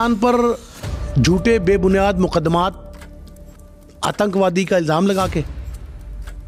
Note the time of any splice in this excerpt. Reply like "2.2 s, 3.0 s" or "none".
none